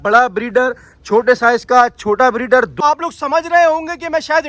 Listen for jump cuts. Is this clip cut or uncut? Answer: cut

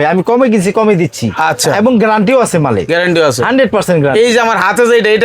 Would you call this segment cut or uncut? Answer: uncut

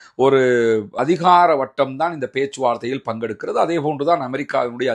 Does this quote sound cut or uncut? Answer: cut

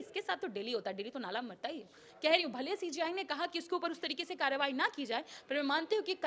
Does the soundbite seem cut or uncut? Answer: cut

